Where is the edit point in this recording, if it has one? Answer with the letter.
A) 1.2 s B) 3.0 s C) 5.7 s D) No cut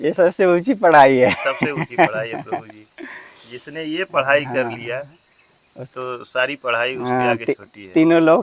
D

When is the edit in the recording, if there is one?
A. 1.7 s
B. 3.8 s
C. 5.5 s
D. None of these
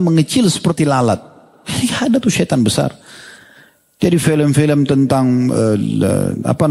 D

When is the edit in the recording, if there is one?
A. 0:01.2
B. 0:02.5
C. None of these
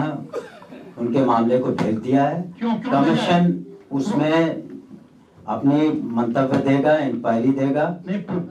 C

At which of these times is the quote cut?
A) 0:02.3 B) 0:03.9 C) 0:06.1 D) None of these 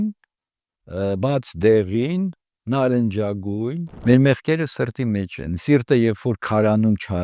B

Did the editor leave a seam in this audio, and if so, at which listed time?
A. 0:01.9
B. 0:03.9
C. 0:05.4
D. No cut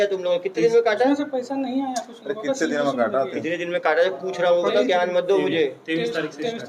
D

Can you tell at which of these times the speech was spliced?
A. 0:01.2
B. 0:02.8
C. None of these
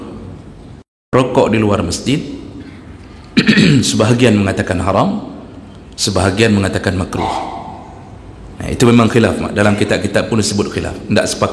A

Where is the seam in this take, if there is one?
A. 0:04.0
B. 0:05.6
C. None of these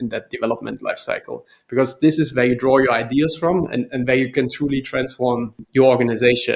B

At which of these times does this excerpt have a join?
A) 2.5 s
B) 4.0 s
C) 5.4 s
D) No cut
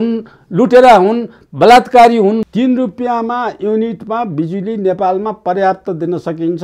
A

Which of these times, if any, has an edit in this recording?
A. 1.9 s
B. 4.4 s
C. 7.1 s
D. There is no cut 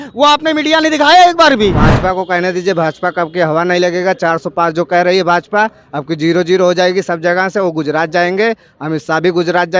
A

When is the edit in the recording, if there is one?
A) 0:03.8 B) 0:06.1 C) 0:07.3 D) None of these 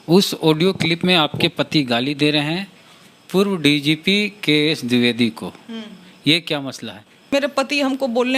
C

